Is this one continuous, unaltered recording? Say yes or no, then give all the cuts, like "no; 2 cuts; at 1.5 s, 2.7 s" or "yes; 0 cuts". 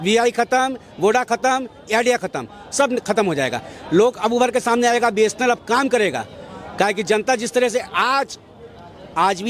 yes; 0 cuts